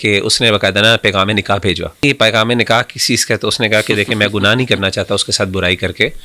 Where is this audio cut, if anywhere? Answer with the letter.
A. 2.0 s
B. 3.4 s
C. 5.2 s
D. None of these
A